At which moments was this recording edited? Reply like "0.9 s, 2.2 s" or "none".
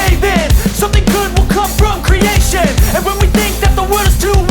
none